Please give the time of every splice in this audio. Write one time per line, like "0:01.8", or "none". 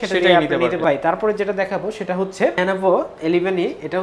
0:00.8
0:02.6